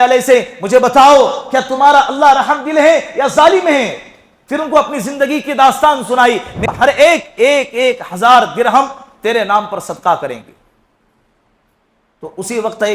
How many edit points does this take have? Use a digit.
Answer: 1